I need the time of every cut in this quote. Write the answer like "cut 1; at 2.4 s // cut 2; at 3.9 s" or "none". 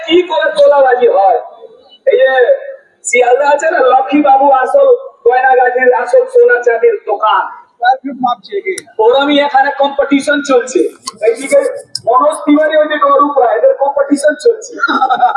none